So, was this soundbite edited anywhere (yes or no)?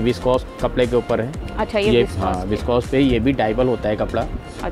no